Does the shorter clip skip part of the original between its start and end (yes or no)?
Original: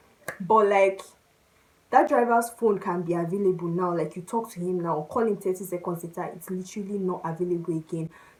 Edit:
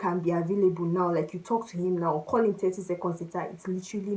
no